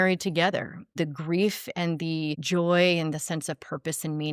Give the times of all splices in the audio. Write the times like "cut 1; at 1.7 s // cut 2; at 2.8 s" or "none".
cut 1; at 0.9 s // cut 2; at 2.4 s